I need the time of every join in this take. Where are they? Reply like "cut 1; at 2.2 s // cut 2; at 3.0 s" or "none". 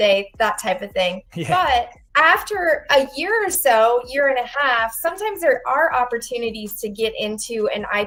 none